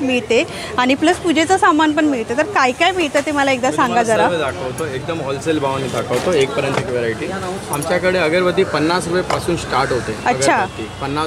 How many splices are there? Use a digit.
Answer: 0